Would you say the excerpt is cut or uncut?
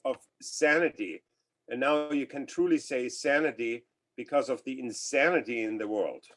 uncut